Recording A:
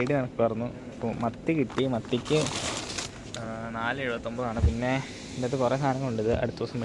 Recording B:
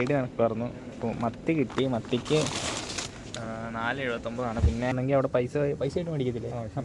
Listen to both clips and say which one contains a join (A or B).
B